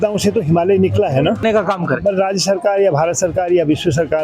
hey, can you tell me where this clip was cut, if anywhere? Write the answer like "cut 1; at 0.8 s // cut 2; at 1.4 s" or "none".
cut 1; at 1.4 s